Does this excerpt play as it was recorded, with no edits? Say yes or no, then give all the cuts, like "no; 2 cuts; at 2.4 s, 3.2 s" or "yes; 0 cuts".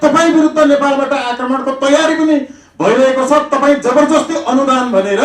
yes; 0 cuts